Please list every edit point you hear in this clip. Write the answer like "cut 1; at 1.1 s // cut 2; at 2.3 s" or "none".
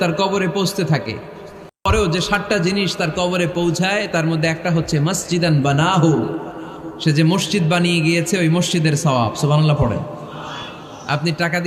cut 1; at 1.9 s